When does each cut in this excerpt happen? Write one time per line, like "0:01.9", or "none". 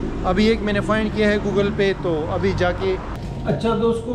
0:03.2